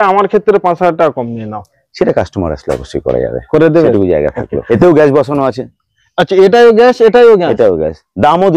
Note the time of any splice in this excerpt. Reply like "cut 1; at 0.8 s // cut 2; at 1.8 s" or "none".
cut 1; at 4.5 s